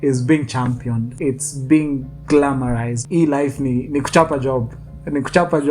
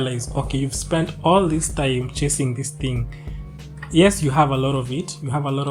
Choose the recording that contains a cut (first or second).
first